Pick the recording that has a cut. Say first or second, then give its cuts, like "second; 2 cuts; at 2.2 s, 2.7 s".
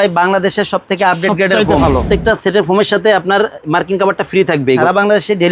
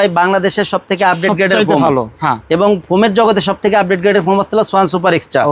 first; 2 cuts; at 1.9 s, 4.8 s